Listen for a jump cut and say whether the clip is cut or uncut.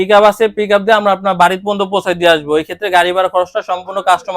uncut